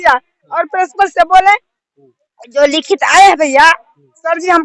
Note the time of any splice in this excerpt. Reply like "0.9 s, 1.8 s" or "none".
none